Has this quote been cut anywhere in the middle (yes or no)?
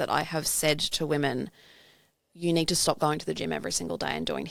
no